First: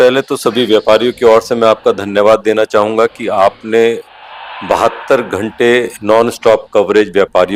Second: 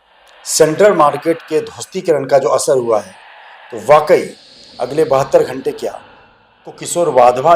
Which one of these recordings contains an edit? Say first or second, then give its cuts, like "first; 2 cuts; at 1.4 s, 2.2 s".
second; 1 cut; at 6.3 s